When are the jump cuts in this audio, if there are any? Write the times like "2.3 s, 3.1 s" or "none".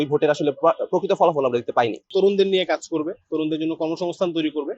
2.1 s